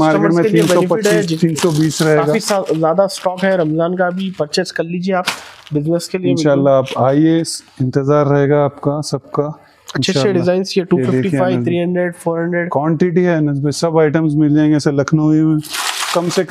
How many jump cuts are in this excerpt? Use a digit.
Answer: 0